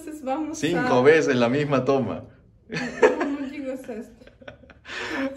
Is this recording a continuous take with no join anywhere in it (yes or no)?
yes